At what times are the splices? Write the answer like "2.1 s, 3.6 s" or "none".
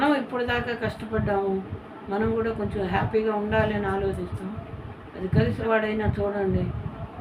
5.6 s